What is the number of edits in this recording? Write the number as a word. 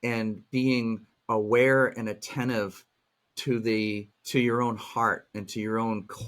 one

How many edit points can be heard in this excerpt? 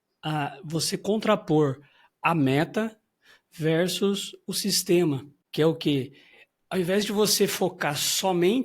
one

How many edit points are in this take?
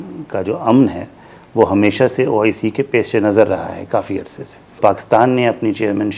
one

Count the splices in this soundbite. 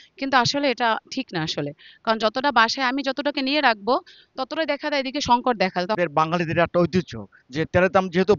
one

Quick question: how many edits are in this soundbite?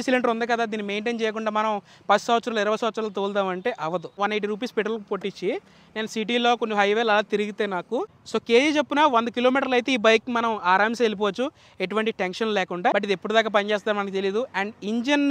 three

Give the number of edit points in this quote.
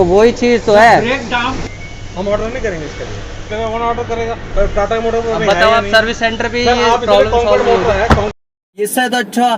two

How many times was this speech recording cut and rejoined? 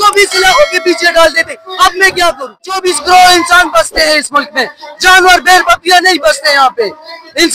one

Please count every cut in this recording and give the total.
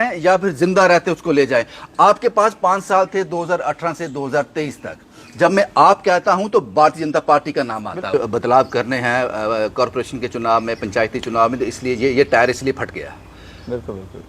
one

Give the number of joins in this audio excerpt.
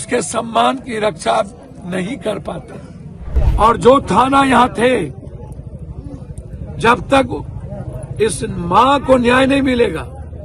one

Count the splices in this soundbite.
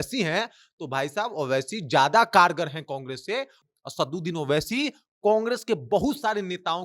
one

